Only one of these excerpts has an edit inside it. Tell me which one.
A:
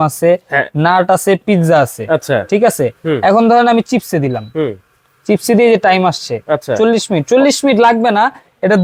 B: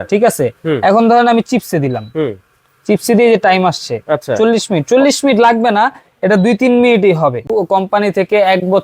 B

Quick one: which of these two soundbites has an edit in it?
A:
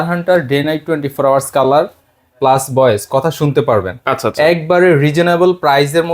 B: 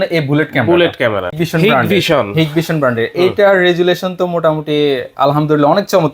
B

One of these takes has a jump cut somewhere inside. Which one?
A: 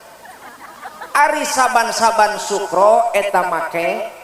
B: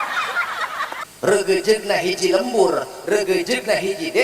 B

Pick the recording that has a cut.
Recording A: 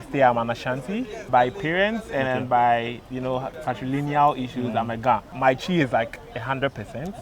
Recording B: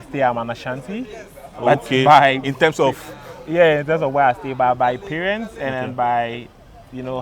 A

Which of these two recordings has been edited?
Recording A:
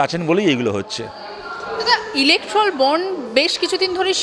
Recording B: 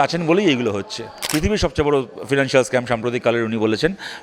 B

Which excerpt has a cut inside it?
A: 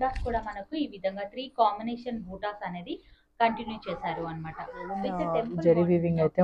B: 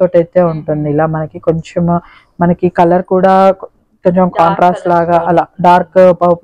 A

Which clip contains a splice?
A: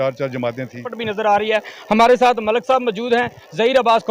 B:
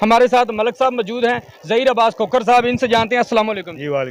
A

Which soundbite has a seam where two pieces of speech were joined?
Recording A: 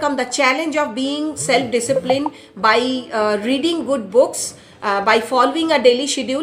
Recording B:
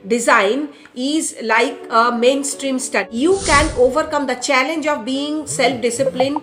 B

